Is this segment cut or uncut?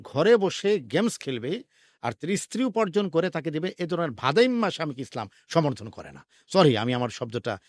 uncut